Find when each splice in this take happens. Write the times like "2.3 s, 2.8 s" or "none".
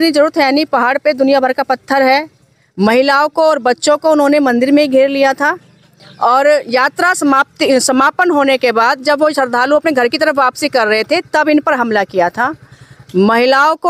none